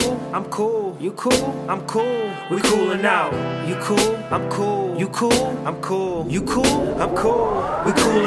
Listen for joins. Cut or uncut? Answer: uncut